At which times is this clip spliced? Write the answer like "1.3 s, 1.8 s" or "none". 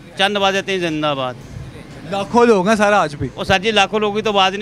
none